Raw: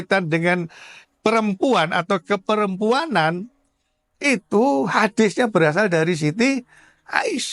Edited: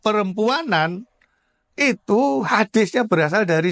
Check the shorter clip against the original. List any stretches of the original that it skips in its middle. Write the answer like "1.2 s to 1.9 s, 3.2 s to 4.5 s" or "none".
none